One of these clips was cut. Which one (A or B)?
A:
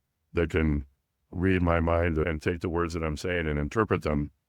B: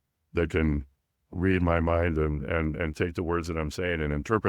A